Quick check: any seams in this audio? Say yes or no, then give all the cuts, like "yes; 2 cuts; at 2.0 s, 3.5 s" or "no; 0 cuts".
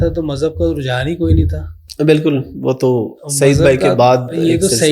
no; 0 cuts